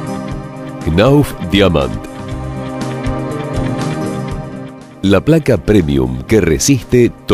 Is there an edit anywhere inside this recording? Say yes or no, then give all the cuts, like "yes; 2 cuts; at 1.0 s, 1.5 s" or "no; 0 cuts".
no; 0 cuts